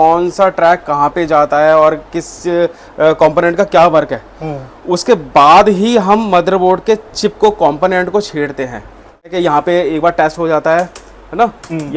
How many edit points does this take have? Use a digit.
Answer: 1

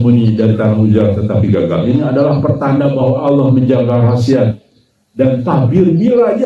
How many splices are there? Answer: 0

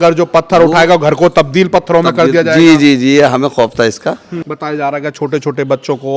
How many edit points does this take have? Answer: 1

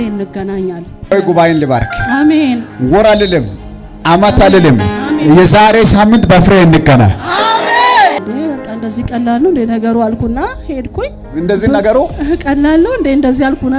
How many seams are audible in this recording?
2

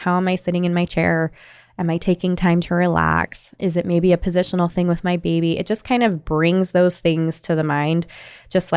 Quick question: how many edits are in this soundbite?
1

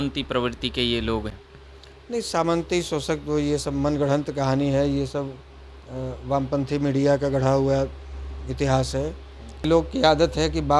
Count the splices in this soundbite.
2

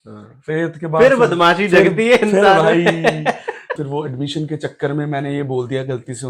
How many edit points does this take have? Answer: 1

